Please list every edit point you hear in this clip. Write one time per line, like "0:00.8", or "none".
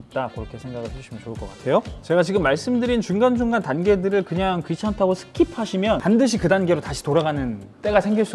0:01.9
0:06.0